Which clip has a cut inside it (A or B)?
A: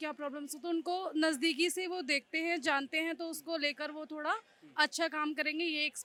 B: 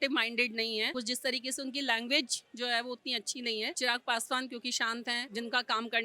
B